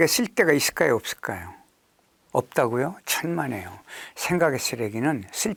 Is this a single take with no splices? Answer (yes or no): yes